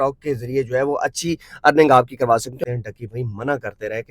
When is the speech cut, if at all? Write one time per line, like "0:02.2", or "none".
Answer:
0:02.6

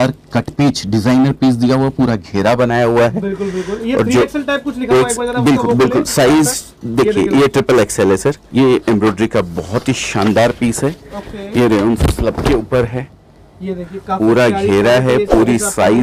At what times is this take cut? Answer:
0:08.4

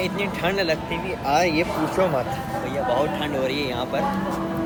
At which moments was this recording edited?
none

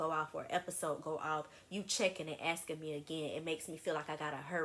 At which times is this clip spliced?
none

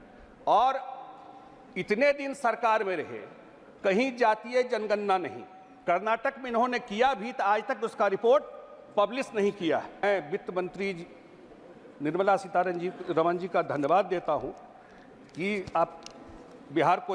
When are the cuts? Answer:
0:10.0

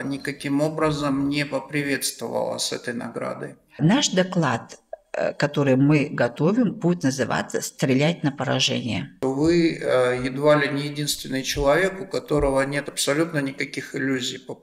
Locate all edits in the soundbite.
0:03.8
0:09.1

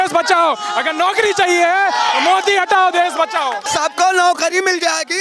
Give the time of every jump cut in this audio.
0:03.6

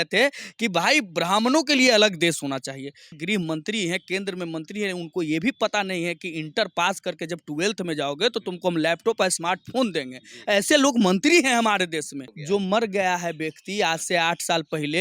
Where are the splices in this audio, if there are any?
0:03.2
0:12.3

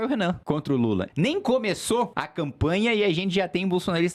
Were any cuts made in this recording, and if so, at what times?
0:01.0
0:02.2

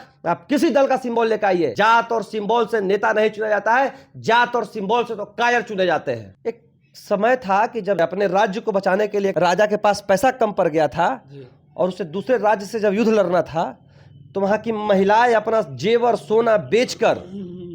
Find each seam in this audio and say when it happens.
0:01.7
0:06.3
0:08.0
0:09.3

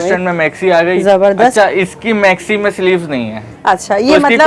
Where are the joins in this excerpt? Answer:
none

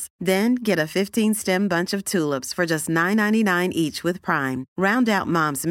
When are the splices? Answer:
none

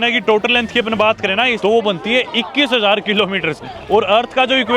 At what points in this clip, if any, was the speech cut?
0:01.5

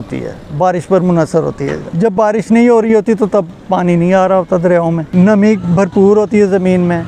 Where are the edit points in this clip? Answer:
0:01.8
0:05.0

